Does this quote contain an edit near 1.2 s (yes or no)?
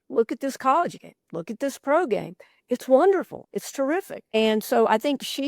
no